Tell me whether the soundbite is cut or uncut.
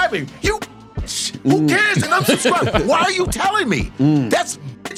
uncut